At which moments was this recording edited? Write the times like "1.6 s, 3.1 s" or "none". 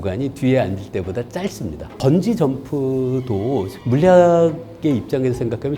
2.0 s

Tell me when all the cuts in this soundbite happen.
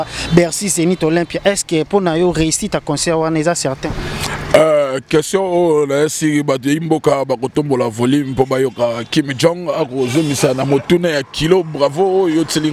none

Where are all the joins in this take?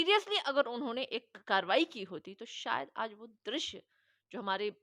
none

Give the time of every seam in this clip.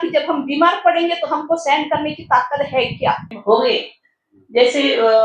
3.4 s

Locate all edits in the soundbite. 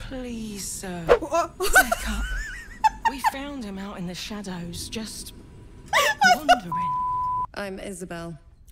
7.5 s

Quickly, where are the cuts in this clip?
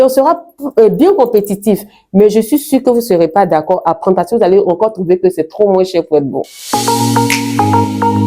6.5 s

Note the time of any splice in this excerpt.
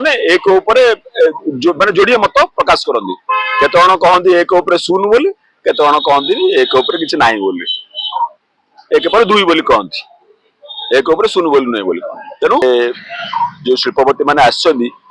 12.6 s

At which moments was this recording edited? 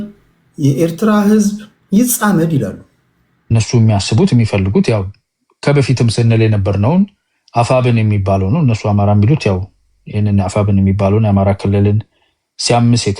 3.5 s

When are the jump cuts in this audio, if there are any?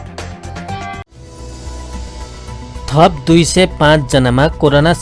1.2 s, 2.3 s

